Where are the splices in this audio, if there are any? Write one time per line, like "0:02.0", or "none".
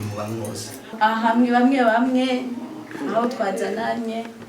0:00.9